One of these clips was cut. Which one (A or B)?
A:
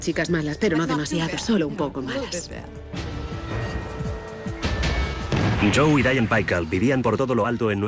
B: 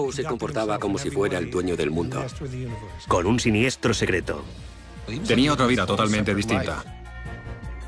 A